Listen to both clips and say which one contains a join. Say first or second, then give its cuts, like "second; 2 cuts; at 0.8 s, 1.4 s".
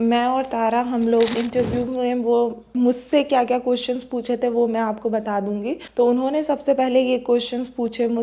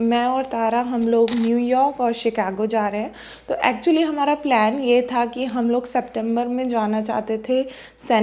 first; 3 cuts; at 1.3 s, 2.7 s, 5.8 s